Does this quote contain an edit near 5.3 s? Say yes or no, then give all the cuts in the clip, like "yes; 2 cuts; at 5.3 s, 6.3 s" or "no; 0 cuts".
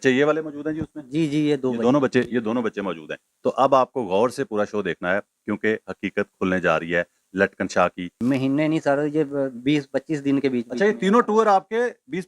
no; 1 cut; at 8.1 s